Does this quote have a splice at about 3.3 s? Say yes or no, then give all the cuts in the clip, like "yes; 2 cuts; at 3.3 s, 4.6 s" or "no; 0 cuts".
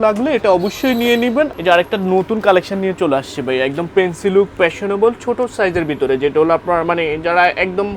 no; 1 cut; at 1.5 s